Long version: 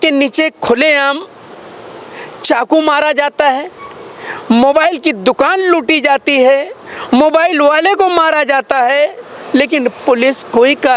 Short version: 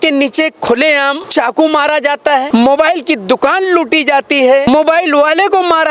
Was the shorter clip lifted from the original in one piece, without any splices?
no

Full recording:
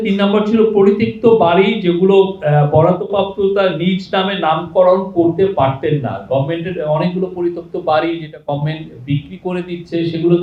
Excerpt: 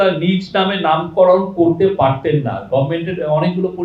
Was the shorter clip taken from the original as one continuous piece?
yes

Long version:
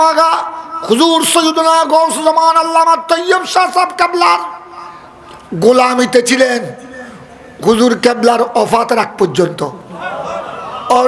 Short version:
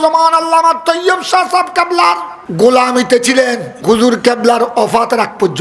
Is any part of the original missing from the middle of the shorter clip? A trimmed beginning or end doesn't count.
yes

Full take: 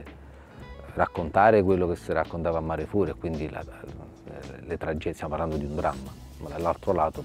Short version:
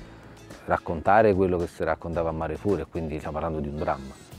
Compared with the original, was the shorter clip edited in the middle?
yes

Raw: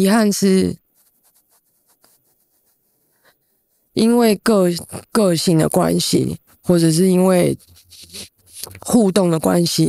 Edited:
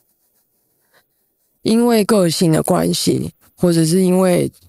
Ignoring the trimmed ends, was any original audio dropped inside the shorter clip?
yes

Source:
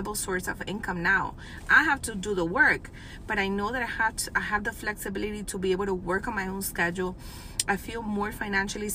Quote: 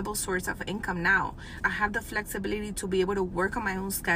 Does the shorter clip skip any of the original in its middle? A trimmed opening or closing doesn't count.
yes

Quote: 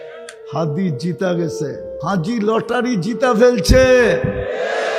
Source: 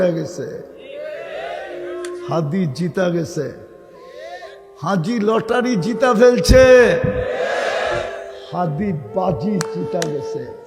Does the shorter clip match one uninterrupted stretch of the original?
no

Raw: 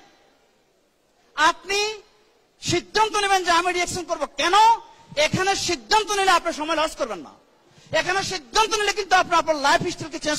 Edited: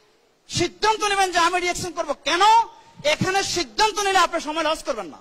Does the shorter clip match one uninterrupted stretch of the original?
yes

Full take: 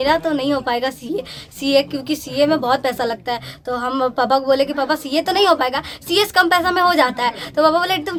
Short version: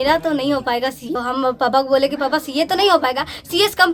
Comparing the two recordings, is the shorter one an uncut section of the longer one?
no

